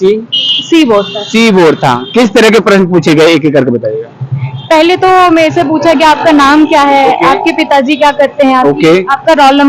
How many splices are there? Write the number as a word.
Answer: zero